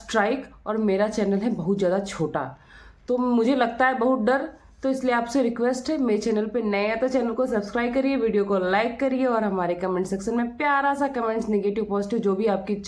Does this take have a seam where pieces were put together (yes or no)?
no